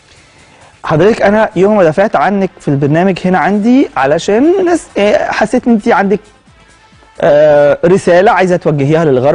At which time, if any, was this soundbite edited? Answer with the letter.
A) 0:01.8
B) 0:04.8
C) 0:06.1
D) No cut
A